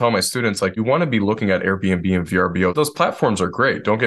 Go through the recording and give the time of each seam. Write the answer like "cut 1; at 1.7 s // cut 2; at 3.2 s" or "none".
cut 1; at 0.8 s // cut 2; at 2.7 s